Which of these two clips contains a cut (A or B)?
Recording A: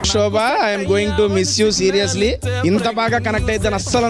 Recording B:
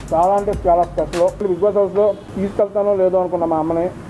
B